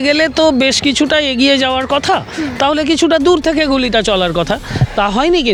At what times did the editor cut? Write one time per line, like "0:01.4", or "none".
none